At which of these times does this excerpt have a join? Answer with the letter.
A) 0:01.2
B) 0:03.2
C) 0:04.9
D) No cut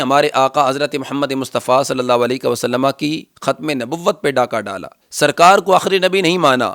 C